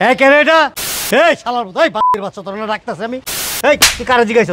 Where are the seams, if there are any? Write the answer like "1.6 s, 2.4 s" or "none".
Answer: 1.0 s, 3.3 s